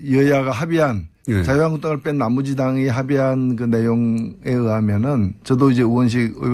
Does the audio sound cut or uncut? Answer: cut